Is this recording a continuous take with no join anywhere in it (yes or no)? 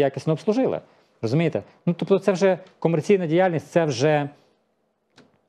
yes